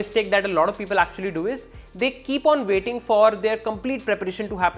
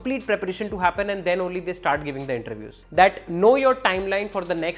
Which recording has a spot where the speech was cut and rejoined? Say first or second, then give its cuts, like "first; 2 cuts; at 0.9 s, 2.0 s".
second; 1 cut; at 2.8 s